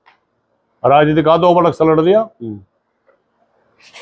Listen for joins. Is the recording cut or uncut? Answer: uncut